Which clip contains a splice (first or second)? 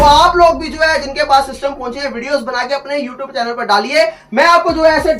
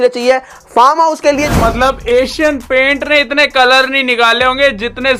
second